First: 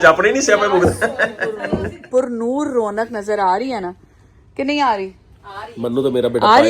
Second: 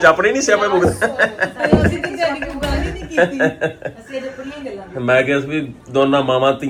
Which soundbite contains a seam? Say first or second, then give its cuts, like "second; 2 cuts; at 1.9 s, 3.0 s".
first; 1 cut; at 1.5 s